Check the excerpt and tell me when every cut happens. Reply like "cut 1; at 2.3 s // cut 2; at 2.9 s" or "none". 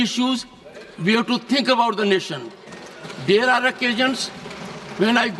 none